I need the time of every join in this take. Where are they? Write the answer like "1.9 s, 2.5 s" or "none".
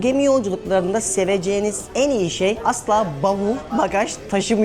2.6 s